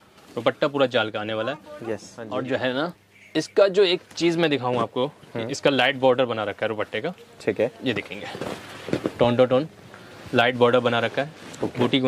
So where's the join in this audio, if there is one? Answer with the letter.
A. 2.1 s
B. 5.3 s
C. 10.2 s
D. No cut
A